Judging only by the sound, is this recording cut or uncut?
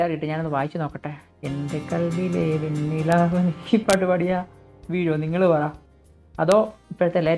uncut